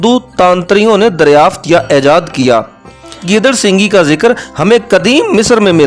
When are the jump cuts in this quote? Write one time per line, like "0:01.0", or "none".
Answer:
0:03.2